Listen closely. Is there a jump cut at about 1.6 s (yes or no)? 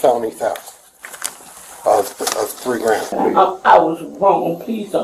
no